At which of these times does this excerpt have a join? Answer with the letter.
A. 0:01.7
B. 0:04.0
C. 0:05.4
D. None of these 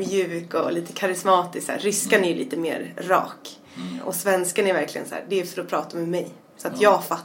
B